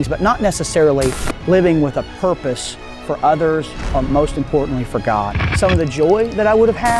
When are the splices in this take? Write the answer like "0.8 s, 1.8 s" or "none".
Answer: 5.4 s